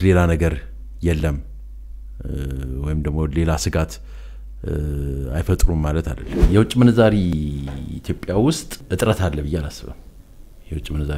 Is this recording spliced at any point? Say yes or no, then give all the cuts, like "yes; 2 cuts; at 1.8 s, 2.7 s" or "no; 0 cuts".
yes; 2 cuts; at 6.4 s, 8.8 s